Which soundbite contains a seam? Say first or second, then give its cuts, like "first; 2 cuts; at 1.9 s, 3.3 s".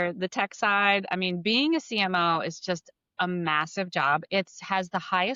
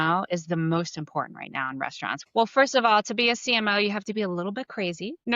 second; 1 cut; at 2.2 s